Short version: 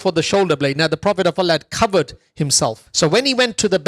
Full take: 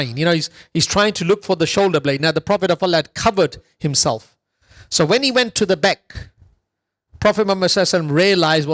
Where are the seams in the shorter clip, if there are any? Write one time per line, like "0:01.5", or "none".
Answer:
0:02.8